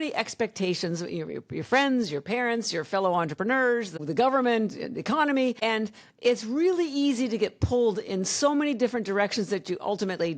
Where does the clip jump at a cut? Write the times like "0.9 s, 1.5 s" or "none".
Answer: 3.9 s, 5.6 s